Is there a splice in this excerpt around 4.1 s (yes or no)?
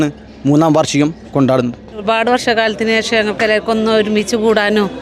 no